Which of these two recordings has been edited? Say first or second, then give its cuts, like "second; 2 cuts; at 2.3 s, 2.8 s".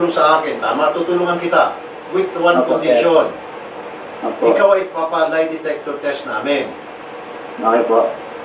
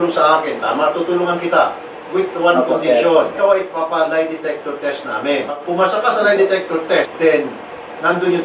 second; 3 cuts; at 3.4 s, 5.6 s, 7.1 s